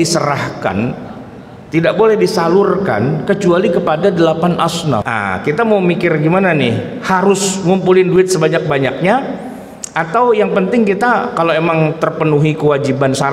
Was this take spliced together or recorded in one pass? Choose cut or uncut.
cut